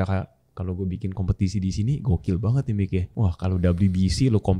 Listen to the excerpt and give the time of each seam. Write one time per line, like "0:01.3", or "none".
0:03.1